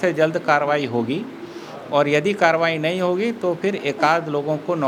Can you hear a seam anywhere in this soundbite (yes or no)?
no